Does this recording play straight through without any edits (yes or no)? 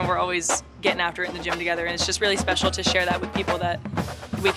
yes